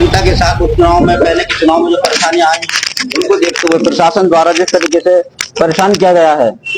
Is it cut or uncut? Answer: uncut